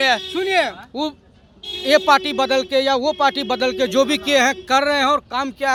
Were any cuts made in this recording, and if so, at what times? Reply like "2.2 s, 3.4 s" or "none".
none